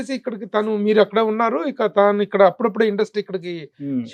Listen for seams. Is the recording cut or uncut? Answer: uncut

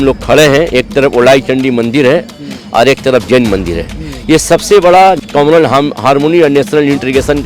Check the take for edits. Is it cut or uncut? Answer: cut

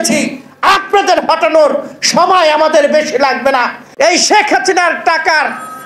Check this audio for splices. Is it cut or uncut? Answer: cut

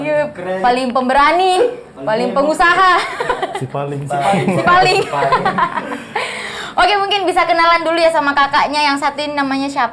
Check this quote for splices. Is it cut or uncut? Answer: uncut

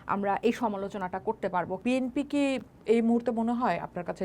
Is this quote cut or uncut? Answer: cut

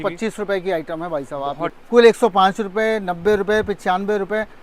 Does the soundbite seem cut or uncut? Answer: cut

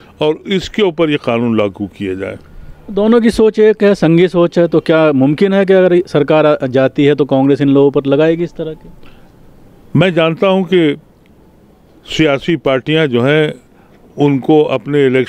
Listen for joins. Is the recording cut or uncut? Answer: uncut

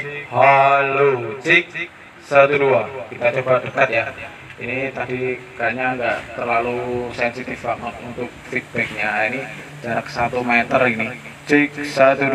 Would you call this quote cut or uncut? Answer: uncut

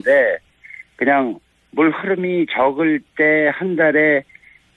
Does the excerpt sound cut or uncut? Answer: cut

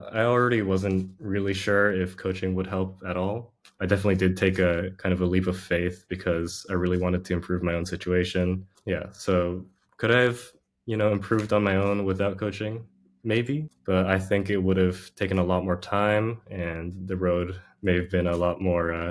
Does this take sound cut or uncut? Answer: uncut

